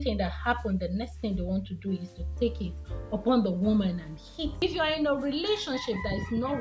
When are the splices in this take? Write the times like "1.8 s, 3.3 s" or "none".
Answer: 4.6 s